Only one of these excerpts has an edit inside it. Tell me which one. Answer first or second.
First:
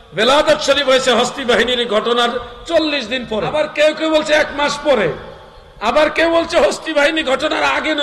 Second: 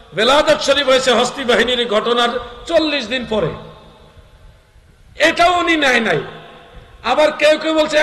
first